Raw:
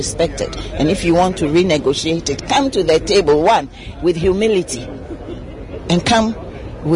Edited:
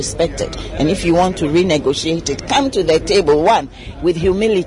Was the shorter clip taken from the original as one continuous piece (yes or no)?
yes